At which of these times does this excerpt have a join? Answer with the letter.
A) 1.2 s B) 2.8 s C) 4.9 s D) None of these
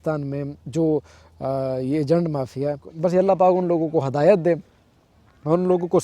B